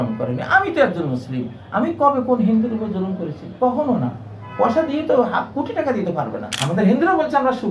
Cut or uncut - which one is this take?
cut